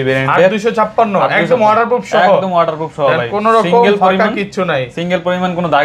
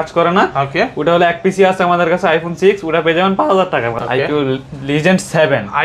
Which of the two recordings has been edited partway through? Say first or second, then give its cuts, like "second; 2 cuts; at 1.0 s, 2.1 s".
second; 1 cut; at 4.0 s